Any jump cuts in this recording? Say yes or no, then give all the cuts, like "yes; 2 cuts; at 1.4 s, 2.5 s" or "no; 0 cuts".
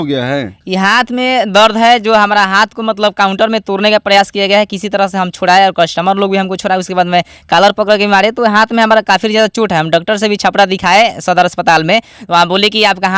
no; 0 cuts